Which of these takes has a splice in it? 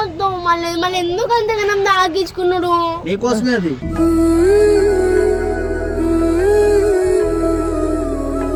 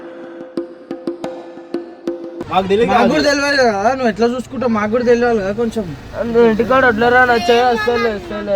second; 1 cut; at 2.4 s

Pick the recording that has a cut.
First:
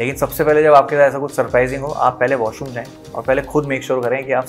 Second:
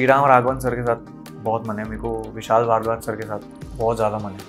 second; 1 cut; at 3.6 s

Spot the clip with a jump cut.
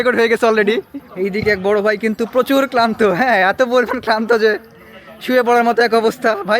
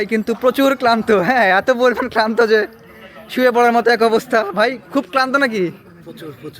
first; 1 cut; at 1.0 s

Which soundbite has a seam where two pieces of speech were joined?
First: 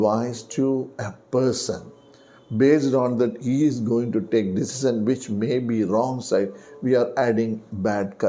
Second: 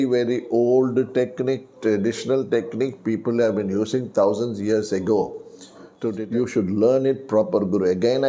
second; 1 cut; at 6.2 s

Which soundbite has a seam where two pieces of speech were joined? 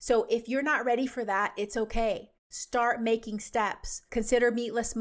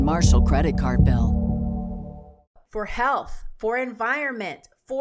second; 1 cut; at 2.5 s

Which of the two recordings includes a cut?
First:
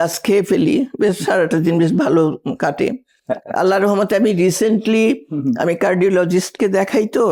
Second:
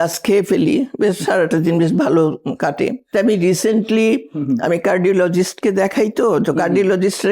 second; 1 cut; at 3.1 s

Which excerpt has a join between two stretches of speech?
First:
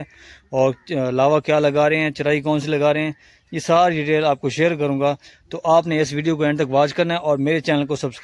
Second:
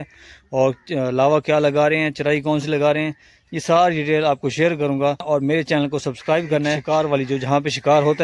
second; 2 cuts; at 5.2 s, 6.8 s

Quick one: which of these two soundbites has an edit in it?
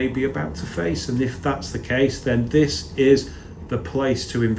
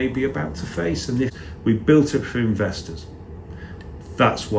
second; 1 cut; at 1.4 s

